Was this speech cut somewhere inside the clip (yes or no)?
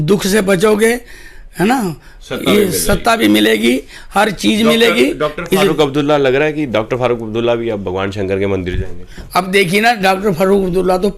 no